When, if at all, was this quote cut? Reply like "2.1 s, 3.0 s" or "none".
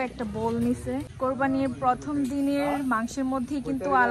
1.1 s